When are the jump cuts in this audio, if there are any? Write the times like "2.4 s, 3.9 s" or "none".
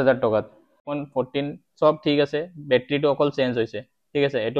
1.0 s